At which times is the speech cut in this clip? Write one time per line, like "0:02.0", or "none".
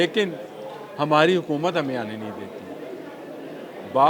none